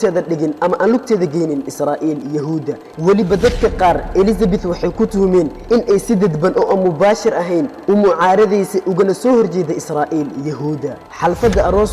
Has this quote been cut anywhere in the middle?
yes; 2 cuts; at 2.8 s, 11.0 s

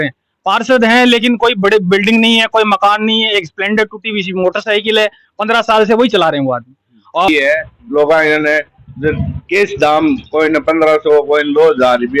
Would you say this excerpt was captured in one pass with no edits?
no; 1 cut; at 7.3 s

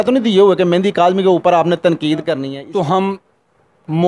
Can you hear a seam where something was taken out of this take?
yes; 1 cut; at 2.5 s

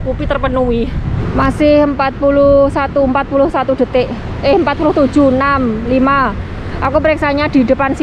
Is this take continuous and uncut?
yes; 0 cuts

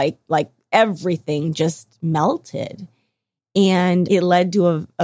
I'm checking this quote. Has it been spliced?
yes; 1 cut; at 4.1 s

